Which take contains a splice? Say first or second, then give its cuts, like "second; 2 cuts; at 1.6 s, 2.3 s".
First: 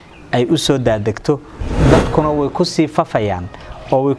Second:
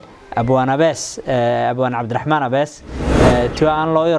first; 1 cut; at 1.6 s